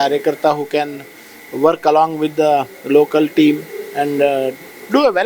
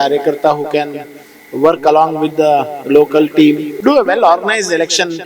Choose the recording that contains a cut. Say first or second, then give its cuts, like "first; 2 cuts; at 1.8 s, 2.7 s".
second; 1 cut; at 3.7 s